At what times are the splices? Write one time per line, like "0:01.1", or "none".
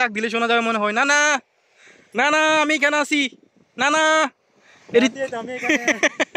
none